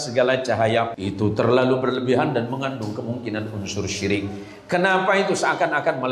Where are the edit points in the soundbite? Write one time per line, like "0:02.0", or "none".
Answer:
0:00.9